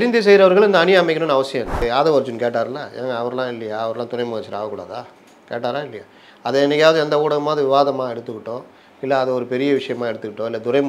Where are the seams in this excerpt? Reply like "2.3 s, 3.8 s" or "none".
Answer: 1.8 s